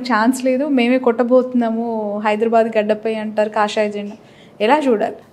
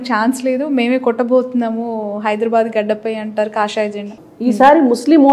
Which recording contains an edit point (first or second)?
second